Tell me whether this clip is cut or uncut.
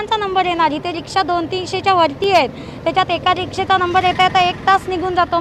uncut